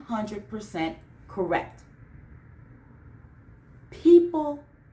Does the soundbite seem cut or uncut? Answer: uncut